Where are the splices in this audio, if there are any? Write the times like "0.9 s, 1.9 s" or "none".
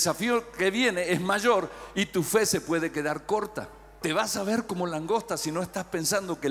3.9 s